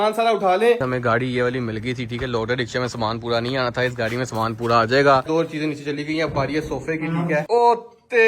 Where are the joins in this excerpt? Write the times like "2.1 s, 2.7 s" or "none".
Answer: 0.8 s, 5.2 s, 7.4 s